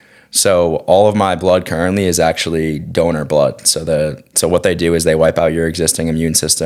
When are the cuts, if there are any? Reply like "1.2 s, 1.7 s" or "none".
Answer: none